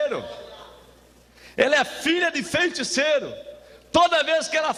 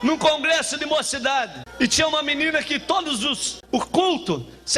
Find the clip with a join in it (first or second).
second